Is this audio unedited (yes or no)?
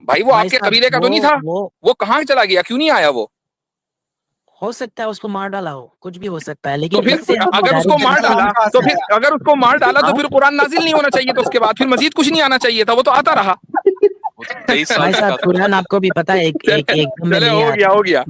no